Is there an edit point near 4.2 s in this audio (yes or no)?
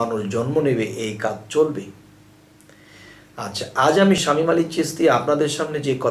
yes